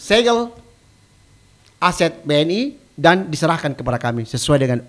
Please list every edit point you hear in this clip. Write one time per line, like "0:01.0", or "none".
none